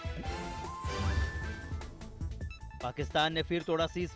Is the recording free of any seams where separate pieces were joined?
no; 1 cut; at 1.0 s

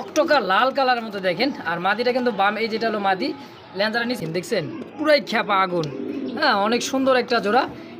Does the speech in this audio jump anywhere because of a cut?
yes; 1 cut; at 4.2 s

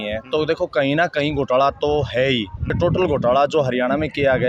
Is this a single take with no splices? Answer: no; 1 cut; at 2.7 s

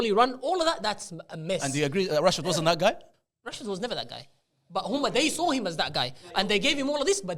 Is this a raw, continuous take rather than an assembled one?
yes; 0 cuts

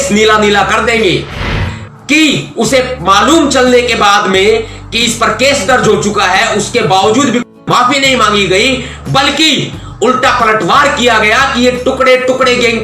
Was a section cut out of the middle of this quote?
yes; 1 cut; at 1.6 s

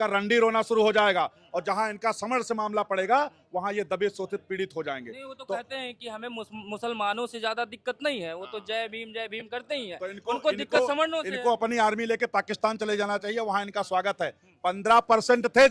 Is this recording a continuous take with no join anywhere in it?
yes; 0 cuts

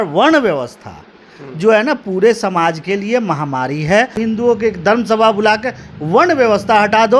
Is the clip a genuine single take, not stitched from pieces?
no; 1 cut; at 4.2 s

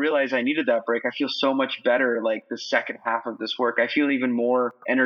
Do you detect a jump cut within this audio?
no; 0 cuts

